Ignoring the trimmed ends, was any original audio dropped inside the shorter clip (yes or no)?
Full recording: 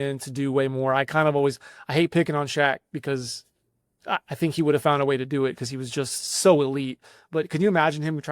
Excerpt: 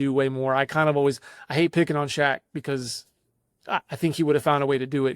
no